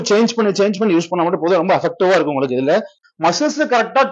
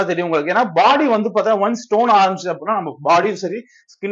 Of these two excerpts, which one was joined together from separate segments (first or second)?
first